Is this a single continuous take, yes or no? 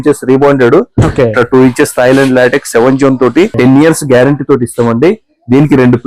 no